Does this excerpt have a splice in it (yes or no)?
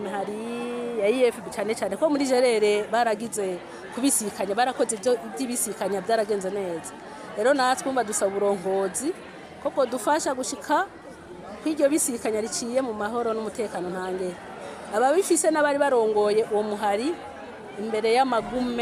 no